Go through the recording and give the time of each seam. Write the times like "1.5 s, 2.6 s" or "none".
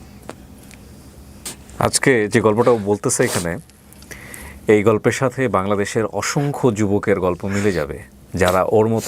1.5 s